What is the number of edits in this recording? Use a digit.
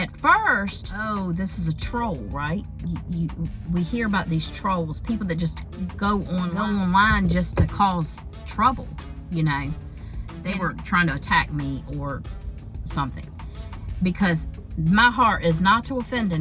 3